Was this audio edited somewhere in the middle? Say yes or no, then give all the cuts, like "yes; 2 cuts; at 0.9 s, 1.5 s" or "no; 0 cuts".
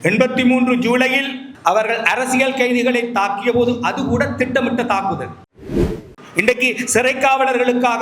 yes; 1 cut; at 1.4 s